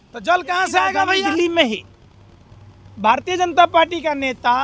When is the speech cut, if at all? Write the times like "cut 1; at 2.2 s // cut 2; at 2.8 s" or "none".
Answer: cut 1; at 1.2 s

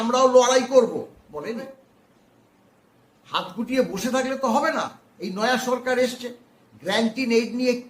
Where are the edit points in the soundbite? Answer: cut 1; at 1.6 s

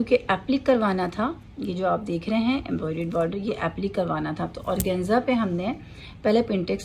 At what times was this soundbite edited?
none

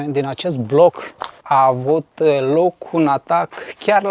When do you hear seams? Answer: cut 1; at 1.4 s

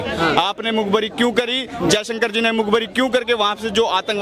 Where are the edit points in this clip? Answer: none

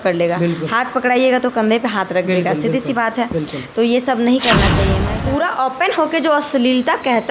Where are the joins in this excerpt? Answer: cut 1; at 4.9 s

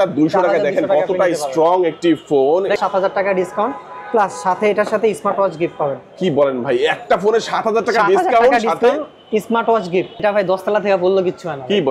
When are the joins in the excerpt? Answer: cut 1; at 2.8 s // cut 2; at 10.2 s

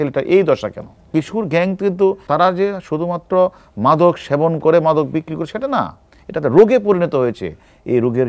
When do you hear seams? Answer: cut 1; at 1.1 s // cut 2; at 2.2 s

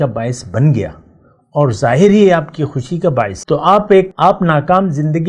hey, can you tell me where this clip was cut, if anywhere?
cut 1; at 3.4 s // cut 2; at 4.1 s

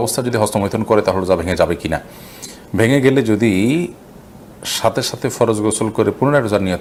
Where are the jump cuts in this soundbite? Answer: none

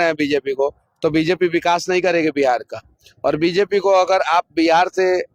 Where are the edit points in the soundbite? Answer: none

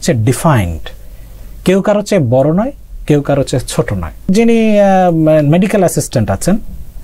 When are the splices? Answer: cut 1; at 4.3 s

